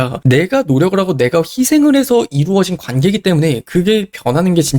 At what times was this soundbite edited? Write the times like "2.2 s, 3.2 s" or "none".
none